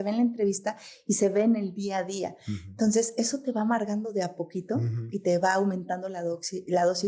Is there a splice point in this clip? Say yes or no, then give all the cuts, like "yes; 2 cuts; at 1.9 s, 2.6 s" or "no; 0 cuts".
no; 0 cuts